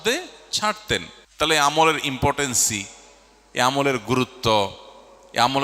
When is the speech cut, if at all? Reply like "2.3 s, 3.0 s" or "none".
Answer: 1.2 s